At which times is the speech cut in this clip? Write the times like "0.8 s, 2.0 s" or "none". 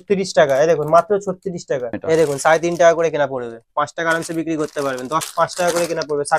1.9 s, 5.3 s